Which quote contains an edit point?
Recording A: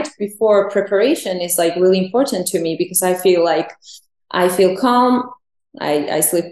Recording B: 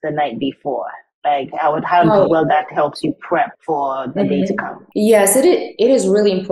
B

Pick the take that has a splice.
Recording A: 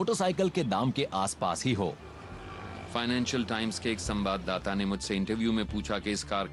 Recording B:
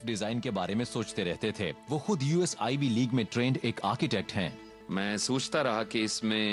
A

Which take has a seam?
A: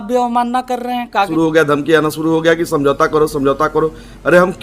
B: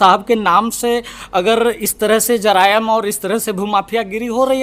A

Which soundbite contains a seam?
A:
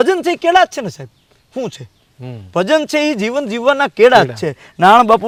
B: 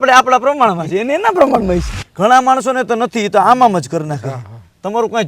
B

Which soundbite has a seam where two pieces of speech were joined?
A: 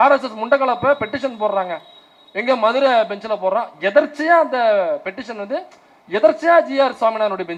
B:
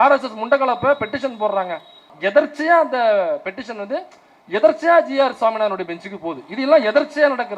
B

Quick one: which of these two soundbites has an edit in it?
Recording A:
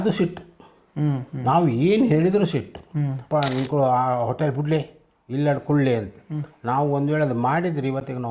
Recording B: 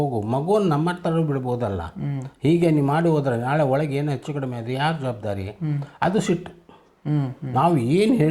A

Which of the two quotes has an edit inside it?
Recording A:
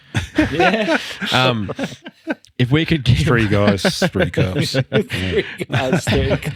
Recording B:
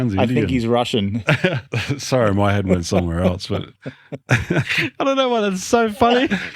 B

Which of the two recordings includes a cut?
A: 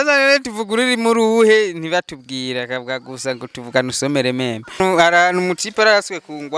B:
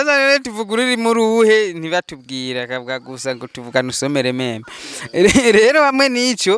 A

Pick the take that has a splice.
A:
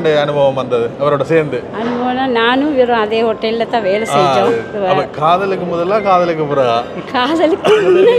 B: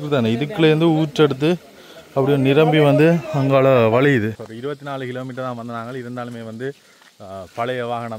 B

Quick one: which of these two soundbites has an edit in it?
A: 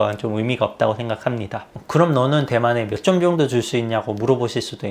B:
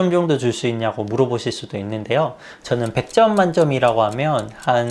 A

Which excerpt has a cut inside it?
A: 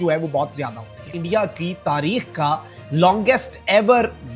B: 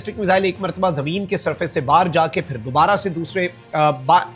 A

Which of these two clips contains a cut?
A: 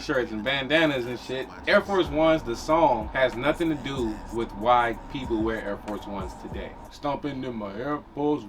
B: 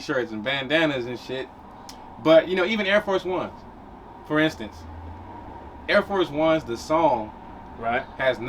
A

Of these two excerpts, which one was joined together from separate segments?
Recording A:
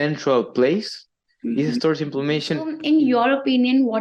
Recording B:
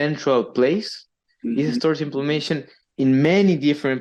A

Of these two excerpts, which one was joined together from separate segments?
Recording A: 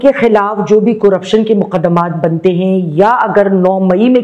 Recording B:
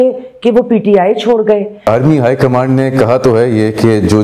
B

